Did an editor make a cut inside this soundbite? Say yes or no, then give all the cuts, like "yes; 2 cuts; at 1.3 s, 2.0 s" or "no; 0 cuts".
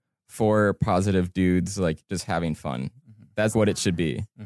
yes; 1 cut; at 3.5 s